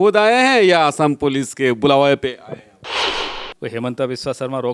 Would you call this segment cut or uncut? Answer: cut